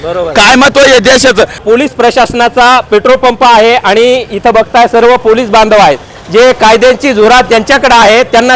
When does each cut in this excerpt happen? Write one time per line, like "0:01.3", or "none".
0:01.6